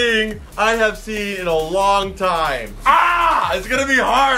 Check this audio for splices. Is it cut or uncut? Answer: uncut